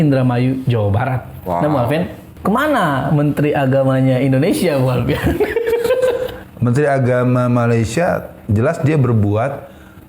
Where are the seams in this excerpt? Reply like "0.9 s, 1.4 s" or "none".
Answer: 2.2 s, 6.4 s